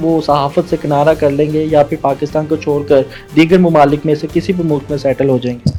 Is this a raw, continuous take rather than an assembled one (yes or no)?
yes